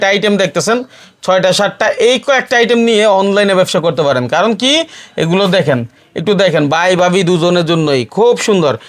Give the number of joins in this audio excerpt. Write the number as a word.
zero